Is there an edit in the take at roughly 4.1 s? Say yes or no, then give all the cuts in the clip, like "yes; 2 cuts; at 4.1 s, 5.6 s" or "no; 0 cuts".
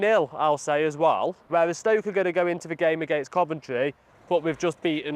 yes; 2 cuts; at 1.4 s, 4.1 s